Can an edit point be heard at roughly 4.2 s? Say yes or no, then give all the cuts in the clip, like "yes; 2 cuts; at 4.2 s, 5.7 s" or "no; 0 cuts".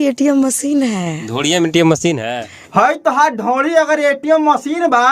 no; 1 cut; at 2.6 s